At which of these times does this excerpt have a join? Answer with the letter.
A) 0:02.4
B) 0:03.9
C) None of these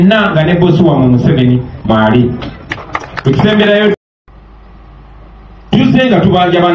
B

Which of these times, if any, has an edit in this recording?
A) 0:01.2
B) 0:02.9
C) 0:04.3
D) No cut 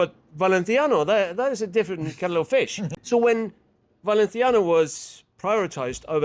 B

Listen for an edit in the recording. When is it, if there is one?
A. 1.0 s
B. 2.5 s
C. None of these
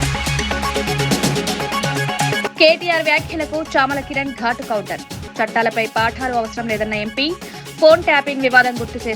B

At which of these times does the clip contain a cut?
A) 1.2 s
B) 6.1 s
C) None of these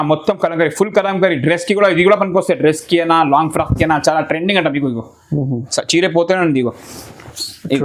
C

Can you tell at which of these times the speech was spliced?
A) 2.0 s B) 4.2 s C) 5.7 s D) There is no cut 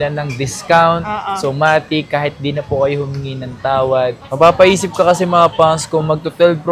B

